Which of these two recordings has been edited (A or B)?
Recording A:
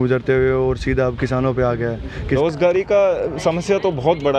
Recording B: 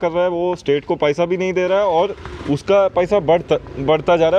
A